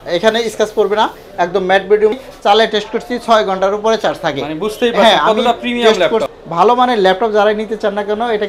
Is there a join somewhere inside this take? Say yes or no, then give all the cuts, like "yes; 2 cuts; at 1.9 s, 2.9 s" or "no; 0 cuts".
yes; 2 cuts; at 2.2 s, 6.3 s